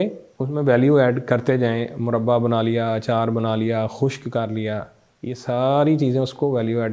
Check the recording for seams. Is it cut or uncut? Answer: uncut